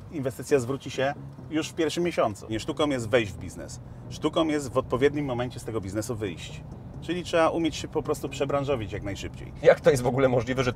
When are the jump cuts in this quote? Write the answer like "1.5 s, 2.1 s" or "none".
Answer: 2.5 s, 9.6 s